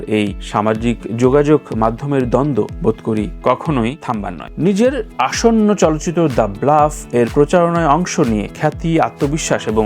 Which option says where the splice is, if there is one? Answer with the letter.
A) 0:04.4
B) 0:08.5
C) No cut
A